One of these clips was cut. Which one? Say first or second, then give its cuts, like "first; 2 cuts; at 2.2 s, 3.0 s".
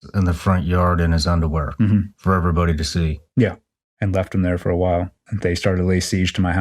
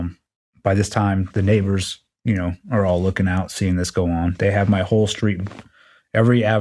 first; 1 cut; at 5.2 s